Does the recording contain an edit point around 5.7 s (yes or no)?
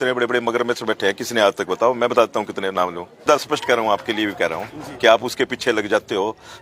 no